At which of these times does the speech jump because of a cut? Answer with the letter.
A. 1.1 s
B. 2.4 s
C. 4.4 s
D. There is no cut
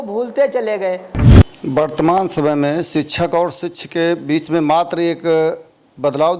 A